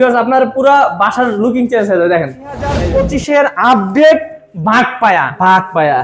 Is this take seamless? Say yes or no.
no